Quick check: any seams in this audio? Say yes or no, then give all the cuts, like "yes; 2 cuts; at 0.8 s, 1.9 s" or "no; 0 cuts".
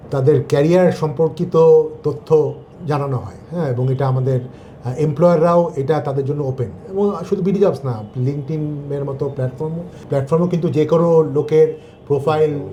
no; 0 cuts